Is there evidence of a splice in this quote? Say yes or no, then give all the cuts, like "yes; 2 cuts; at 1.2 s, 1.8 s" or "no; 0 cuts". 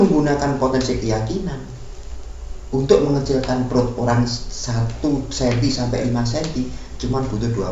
no; 0 cuts